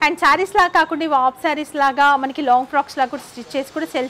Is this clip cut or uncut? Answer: uncut